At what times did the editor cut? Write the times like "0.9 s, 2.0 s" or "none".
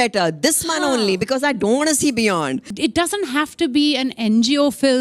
2.7 s